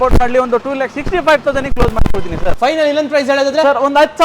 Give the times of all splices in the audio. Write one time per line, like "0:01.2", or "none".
0:02.5